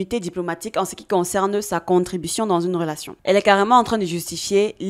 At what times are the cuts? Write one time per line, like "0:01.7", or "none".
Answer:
0:03.0